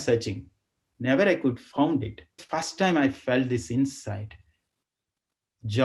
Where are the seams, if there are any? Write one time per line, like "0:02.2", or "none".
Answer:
0:02.5